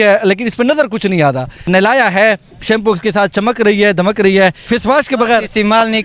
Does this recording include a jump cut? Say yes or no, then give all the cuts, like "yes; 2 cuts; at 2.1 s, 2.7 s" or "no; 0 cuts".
yes; 2 cuts; at 1.7 s, 4.6 s